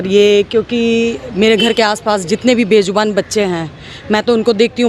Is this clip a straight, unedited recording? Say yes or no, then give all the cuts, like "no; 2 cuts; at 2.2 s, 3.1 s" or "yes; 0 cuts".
yes; 0 cuts